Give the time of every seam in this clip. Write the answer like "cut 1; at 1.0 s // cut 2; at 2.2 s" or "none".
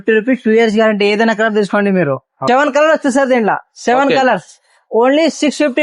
cut 1; at 2.3 s